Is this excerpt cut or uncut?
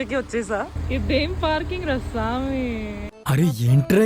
cut